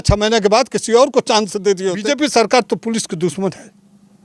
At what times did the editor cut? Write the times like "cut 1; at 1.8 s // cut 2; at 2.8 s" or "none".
cut 1; at 2.0 s